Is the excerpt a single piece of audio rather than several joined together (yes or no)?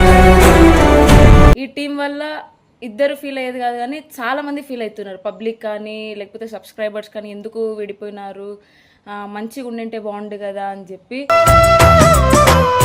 no